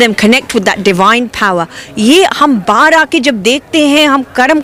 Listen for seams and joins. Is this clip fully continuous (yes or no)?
yes